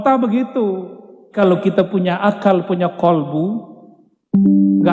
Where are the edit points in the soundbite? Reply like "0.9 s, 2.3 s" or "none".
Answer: 1.3 s